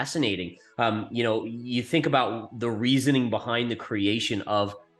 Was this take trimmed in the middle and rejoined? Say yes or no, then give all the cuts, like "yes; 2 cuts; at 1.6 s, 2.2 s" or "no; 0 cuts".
no; 0 cuts